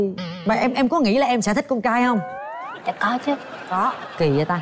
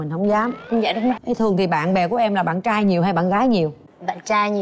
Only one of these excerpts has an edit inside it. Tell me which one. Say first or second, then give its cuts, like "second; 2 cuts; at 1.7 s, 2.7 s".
second; 1 cut; at 1.2 s